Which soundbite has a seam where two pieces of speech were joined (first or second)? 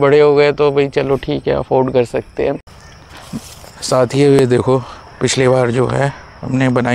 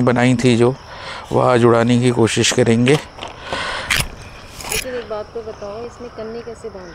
first